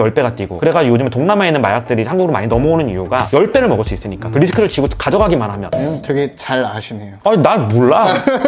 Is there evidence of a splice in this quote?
yes; 1 cut; at 5.6 s

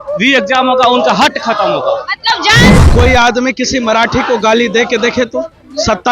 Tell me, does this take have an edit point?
yes; 1 cut; at 2.8 s

